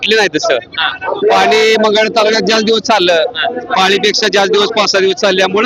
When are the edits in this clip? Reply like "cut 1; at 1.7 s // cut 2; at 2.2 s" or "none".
none